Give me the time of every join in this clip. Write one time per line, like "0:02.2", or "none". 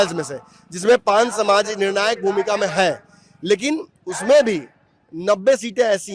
none